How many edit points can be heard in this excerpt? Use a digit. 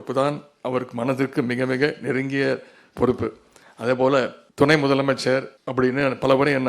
2